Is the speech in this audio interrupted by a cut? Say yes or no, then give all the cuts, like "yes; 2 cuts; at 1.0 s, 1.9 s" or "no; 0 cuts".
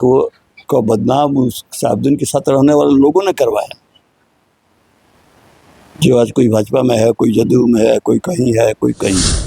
no; 0 cuts